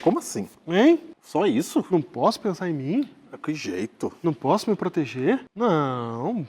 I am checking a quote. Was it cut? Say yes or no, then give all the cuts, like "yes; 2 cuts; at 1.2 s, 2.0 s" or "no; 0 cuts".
yes; 2 cuts; at 1.2 s, 5.5 s